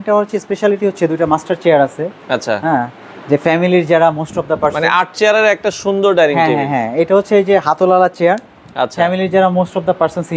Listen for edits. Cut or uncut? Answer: uncut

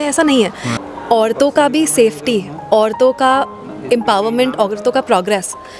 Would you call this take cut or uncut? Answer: cut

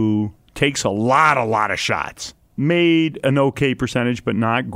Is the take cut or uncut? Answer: cut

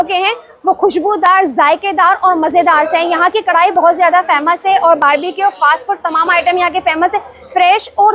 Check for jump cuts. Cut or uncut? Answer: uncut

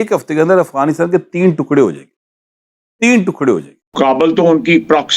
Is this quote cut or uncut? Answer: cut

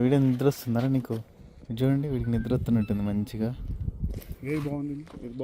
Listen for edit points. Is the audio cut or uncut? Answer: uncut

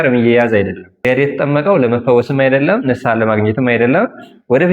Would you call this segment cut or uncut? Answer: cut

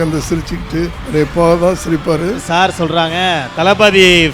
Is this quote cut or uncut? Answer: cut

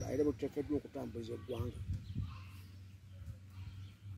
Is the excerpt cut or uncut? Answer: uncut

